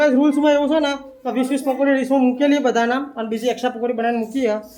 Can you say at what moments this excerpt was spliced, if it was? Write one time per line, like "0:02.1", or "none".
none